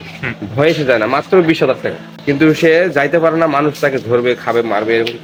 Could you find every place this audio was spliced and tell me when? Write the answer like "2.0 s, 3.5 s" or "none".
none